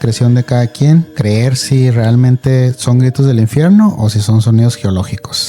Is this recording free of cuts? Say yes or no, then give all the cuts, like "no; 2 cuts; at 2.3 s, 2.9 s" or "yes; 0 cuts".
no; 1 cut; at 1.1 s